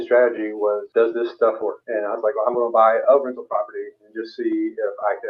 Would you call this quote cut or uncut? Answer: cut